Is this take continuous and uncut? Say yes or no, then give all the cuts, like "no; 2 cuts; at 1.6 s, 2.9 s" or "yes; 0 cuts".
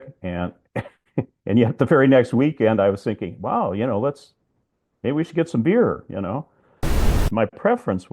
no; 1 cut; at 7.1 s